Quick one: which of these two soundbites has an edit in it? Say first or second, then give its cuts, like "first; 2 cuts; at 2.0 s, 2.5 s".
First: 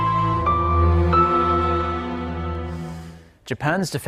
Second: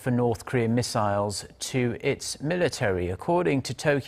second; 1 cut; at 2.6 s